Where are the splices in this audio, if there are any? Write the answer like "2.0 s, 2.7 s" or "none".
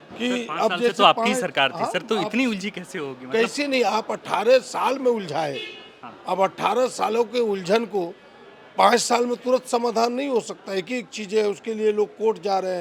none